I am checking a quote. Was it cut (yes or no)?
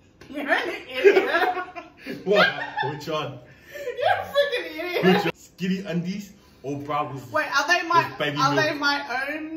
yes